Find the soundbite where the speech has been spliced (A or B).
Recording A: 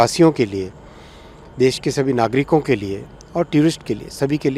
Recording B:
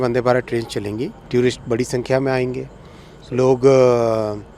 B